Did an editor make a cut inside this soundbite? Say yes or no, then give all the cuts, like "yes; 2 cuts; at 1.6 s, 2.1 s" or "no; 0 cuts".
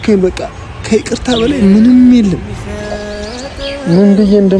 yes; 1 cut; at 3.0 s